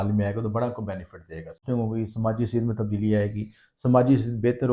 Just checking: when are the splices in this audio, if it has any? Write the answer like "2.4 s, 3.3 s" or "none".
1.6 s

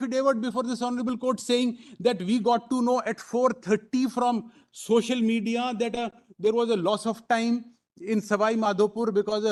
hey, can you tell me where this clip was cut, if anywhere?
none

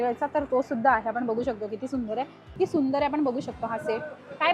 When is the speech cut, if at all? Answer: 2.4 s

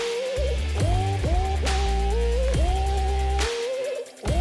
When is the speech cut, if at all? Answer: none

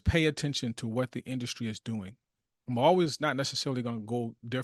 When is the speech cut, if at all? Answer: none

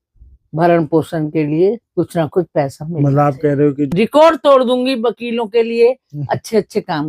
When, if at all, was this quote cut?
3.8 s

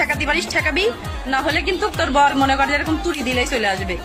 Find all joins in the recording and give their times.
none

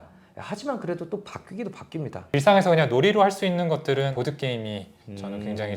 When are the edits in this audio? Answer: 2.3 s, 4.1 s

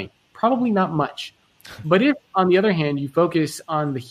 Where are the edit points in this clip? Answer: none

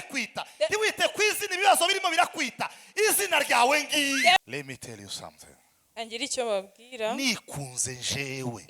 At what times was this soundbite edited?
4.4 s

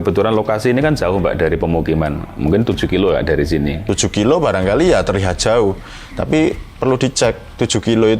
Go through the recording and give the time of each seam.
3.8 s

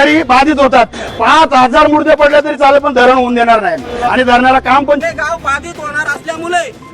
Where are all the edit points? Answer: 5.0 s

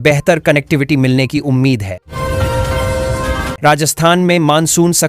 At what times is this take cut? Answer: 2.1 s, 3.5 s

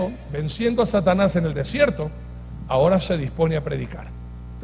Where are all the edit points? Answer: 1.5 s

